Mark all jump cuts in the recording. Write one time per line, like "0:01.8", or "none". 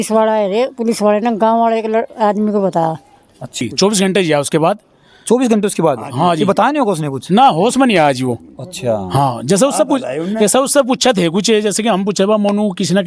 0:03.6